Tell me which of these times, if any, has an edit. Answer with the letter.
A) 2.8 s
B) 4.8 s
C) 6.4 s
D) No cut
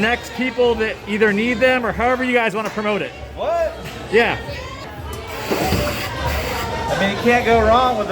B